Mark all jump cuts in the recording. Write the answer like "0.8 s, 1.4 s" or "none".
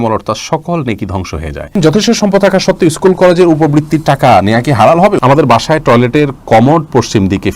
1.7 s, 5.2 s